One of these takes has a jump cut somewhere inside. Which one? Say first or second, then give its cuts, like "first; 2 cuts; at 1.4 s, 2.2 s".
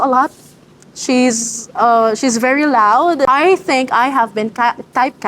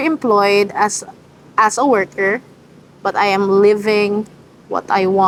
first; 1 cut; at 3.3 s